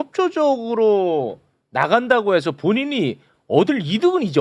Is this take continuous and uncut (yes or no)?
yes